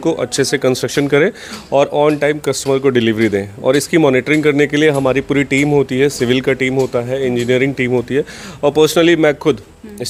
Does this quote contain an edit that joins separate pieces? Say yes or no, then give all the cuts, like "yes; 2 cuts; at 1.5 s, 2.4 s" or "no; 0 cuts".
no; 0 cuts